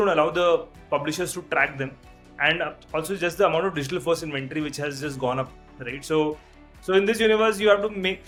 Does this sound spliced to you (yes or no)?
no